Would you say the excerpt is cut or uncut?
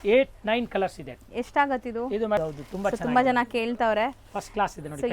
cut